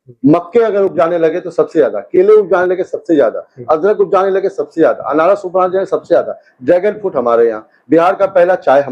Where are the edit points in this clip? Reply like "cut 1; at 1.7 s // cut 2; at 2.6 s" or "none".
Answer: none